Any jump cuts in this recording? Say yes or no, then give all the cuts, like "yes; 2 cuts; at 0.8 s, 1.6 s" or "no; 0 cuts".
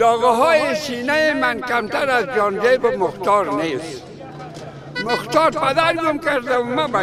no; 0 cuts